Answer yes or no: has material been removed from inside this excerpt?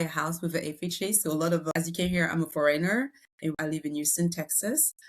yes